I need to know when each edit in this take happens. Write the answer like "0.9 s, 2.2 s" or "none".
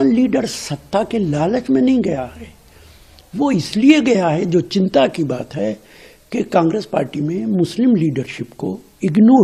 none